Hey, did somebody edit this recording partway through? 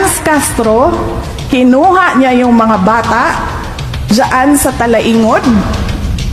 no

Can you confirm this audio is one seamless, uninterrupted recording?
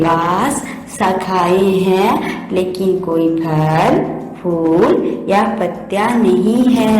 yes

